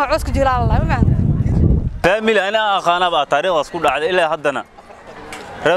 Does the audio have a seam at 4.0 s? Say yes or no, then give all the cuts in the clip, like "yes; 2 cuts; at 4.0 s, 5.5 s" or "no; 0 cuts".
no; 1 cut; at 1.9 s